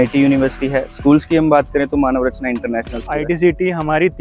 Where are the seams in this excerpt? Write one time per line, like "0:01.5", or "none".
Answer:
0:03.1